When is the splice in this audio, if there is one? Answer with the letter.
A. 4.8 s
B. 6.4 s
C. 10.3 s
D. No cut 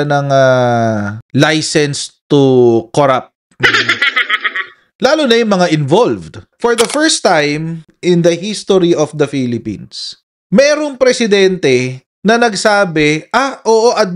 B